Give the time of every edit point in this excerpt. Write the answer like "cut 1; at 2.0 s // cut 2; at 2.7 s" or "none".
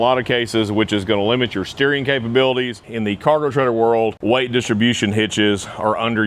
cut 1; at 2.8 s // cut 2; at 4.2 s